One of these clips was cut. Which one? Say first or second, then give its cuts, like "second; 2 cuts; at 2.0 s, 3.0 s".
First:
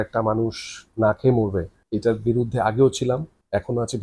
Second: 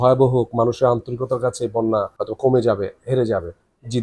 second; 1 cut; at 2.2 s